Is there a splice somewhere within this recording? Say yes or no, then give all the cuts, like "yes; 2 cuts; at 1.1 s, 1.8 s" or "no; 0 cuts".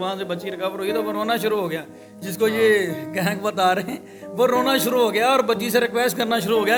no; 0 cuts